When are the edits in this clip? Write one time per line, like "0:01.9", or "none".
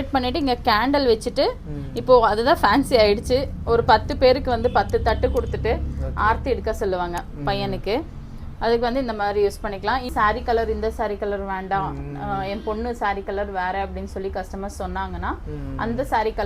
0:10.1